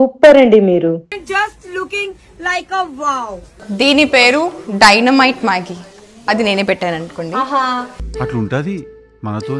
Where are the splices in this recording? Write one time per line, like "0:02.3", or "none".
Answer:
0:03.5